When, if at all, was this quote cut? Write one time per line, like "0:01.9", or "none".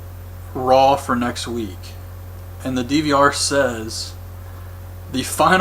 0:02.9